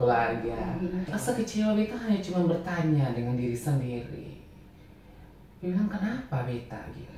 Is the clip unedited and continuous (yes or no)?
no